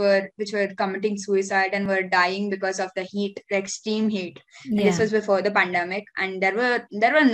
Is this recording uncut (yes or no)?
yes